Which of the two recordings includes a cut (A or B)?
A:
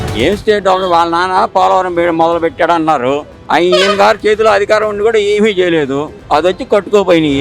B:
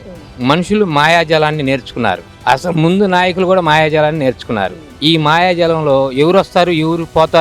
A